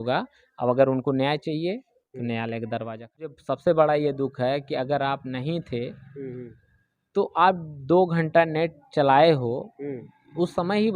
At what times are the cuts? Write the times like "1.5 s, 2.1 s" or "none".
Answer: 3.4 s